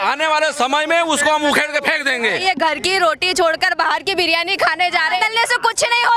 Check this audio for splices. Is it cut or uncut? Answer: cut